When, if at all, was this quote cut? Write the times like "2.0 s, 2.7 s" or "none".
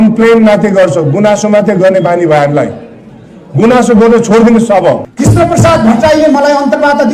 5.1 s